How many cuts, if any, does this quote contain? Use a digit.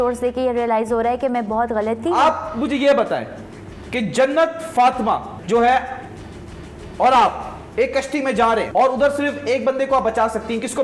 2